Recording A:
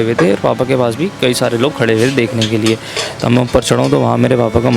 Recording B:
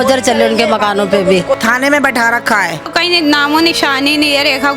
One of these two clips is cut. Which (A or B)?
B